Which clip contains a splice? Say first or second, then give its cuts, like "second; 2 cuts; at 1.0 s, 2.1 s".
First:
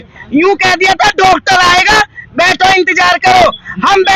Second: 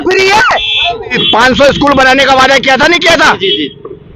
second; 1 cut; at 1.1 s